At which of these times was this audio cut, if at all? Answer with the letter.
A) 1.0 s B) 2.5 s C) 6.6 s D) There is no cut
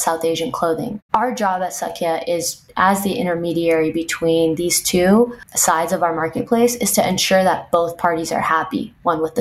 A